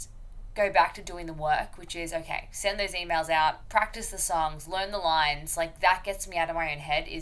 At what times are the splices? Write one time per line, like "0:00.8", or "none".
0:03.6